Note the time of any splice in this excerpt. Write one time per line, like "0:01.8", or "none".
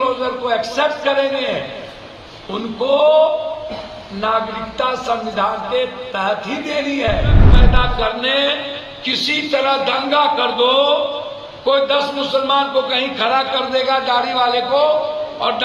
0:07.5